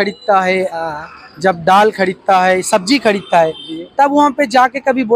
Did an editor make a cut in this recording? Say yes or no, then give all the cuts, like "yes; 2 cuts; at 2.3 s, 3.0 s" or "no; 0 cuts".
no; 0 cuts